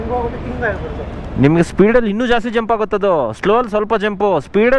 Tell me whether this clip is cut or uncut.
uncut